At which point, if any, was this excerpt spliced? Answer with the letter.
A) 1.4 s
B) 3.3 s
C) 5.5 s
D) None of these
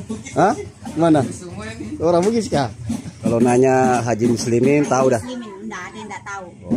B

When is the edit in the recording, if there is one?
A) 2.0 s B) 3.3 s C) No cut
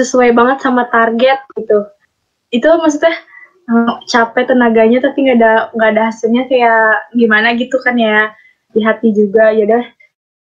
A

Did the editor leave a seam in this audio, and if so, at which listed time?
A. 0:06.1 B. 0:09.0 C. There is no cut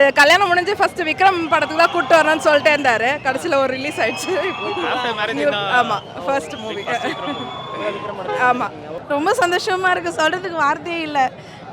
B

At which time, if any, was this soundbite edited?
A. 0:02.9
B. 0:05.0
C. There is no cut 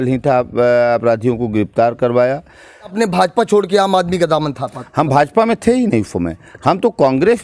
A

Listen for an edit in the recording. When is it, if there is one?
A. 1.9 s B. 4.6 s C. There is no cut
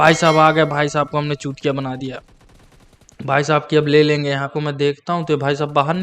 B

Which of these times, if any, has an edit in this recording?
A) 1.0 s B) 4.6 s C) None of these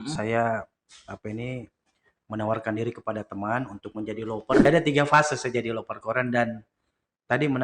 B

